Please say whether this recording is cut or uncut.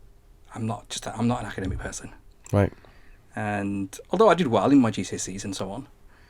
uncut